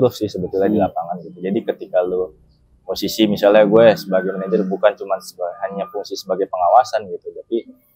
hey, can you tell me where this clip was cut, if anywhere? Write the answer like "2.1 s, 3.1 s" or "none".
none